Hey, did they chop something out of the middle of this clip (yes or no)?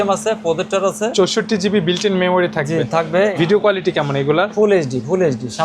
yes